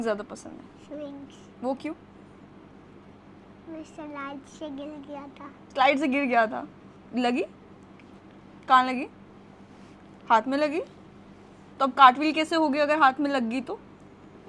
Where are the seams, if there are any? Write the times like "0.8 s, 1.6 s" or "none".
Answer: none